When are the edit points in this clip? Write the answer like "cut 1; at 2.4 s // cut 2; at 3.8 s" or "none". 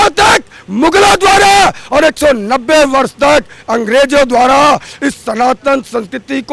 none